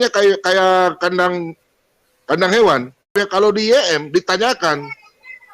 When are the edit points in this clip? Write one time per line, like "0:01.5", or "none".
0:03.1